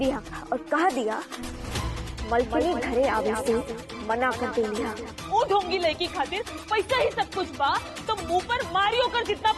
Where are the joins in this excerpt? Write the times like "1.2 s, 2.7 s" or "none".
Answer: 5.1 s